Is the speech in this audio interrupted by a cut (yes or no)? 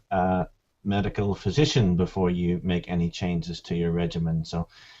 no